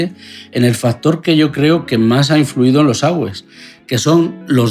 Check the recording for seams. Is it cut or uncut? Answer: uncut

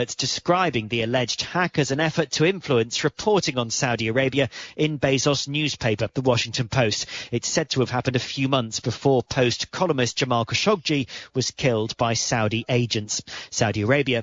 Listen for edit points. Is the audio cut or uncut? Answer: uncut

